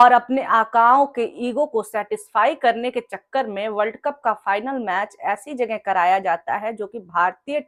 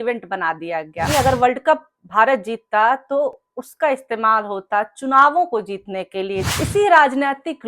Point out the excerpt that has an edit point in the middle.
second; 2 cuts; at 1.1 s, 6.5 s

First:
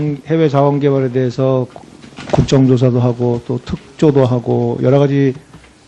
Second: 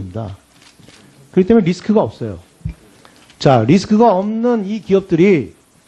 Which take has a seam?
second; 1 cut; at 3.7 s

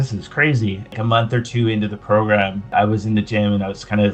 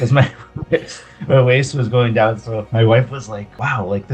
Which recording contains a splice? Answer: first; 2 cuts; at 0.9 s, 2.7 s

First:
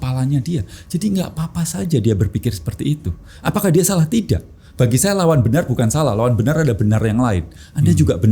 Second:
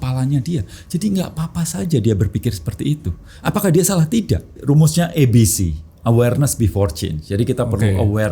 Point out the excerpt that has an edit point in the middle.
second; 1 cut; at 4.6 s

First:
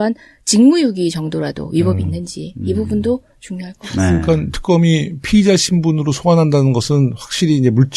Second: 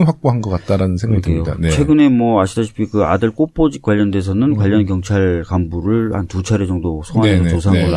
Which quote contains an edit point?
first; 1 cut; at 5.5 s

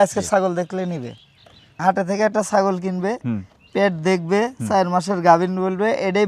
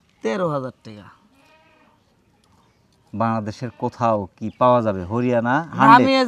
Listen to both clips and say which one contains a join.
first; 1 cut; at 1.7 s

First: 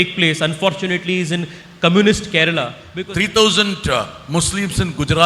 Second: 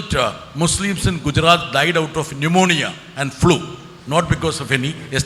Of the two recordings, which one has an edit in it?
first; 1 cut; at 2.8 s

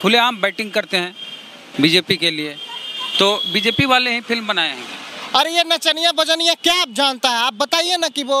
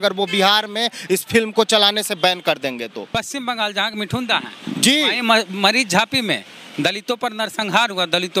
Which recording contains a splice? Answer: second; 1 cut; at 3.2 s

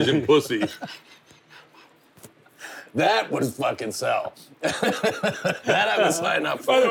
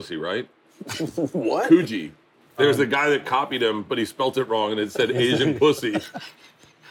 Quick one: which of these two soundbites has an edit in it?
second; 1 cut; at 2.5 s

